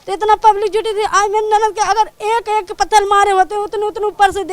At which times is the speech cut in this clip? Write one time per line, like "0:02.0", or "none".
0:02.2

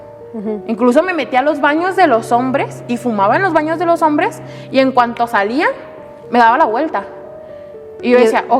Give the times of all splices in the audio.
none

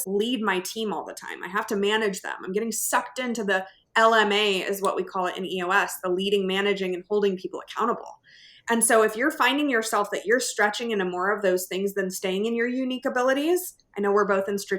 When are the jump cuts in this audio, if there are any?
none

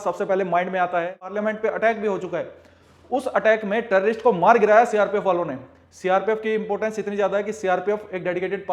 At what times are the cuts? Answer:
0:01.3

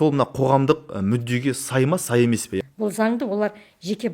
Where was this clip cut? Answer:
0:02.6

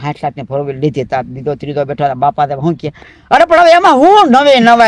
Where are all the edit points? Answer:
none

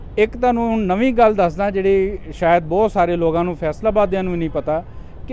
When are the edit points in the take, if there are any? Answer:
none

